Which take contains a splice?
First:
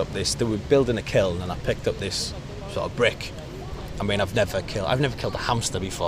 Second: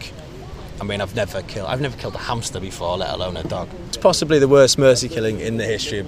second; 1 cut; at 3.8 s

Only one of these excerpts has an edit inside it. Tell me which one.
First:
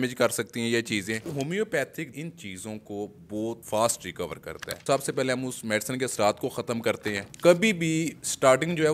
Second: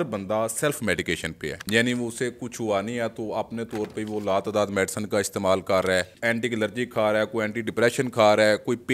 first; 5 cuts; at 1.3 s, 2.1 s, 3.6 s, 4.8 s, 7.1 s

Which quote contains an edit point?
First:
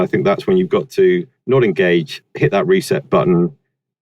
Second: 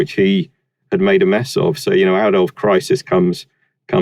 first; 2 cuts; at 1.3 s, 2.2 s

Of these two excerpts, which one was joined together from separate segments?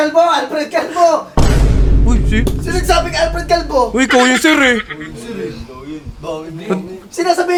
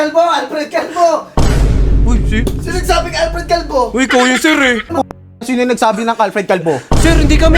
second; 1 cut; at 4.9 s

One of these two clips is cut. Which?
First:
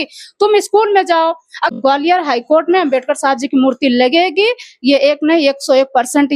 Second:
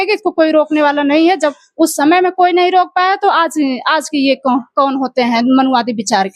first; 1 cut; at 1.7 s

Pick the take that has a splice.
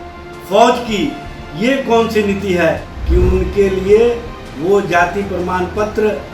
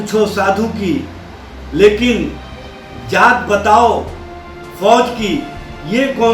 first; 1 cut; at 2.9 s

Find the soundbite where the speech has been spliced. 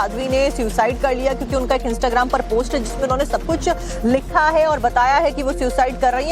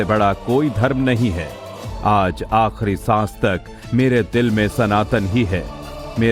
first; 1 cut; at 4.9 s

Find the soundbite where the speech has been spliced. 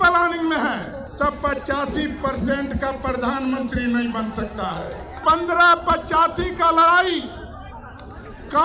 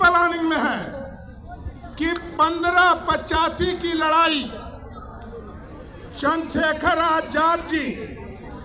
first; 2 cuts; at 1.0 s, 5.2 s

